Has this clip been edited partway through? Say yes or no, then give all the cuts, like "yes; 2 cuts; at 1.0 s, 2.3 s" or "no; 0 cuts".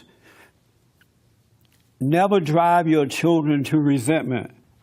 no; 0 cuts